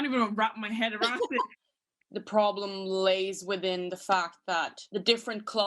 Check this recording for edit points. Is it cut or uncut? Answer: cut